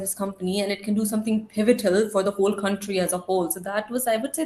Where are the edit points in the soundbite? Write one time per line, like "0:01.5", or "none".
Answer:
none